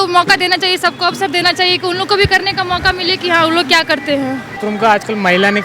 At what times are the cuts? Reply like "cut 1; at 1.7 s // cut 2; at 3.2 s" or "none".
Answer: cut 1; at 4.7 s